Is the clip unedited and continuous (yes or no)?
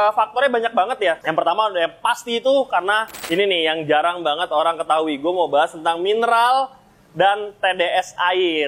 no